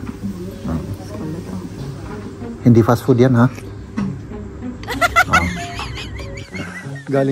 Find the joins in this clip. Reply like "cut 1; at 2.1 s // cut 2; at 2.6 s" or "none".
cut 1; at 6.3 s